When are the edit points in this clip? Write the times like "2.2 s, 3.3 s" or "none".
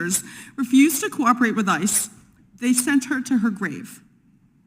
none